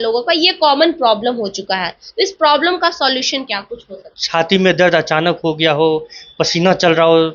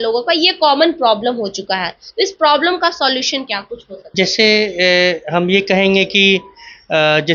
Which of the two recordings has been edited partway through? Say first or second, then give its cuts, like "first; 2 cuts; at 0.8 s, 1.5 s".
first; 1 cut; at 4.0 s